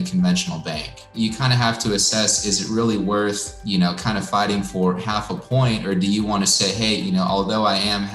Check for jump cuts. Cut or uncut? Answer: cut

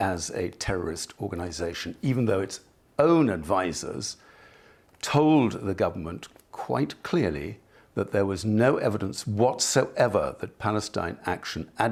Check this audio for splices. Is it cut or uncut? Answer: uncut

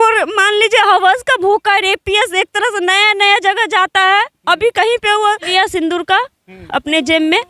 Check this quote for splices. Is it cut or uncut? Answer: cut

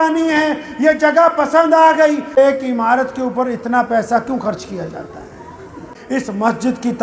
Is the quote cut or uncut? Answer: cut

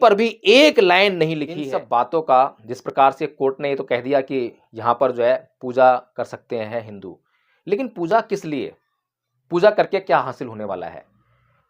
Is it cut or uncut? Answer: cut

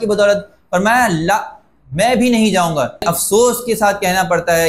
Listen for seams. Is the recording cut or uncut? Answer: cut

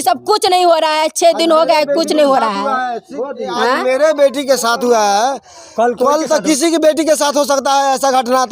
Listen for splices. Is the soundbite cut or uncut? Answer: uncut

